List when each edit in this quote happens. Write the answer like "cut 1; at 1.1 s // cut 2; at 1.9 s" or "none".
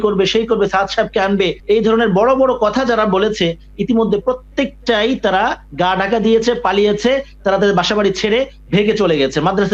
none